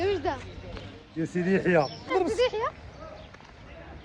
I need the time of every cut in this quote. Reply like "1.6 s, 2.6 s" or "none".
2.1 s